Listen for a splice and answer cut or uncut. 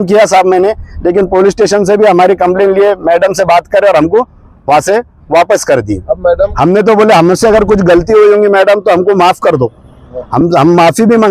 cut